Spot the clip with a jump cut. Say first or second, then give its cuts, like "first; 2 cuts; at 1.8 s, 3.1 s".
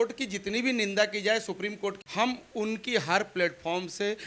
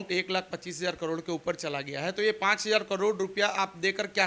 first; 1 cut; at 2.0 s